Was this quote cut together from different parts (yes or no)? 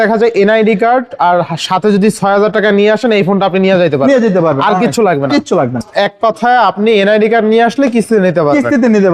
yes